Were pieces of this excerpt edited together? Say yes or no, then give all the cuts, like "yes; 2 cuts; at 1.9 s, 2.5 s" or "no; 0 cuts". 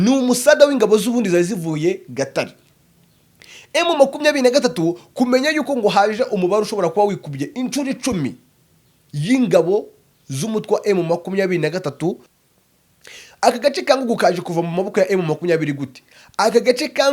yes; 1 cut; at 12.2 s